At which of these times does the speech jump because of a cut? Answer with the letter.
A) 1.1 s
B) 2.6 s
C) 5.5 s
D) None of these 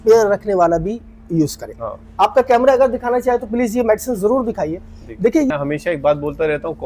C